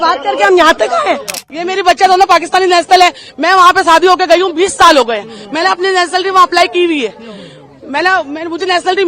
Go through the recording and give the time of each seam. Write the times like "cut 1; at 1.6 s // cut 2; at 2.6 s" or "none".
cut 1; at 1.5 s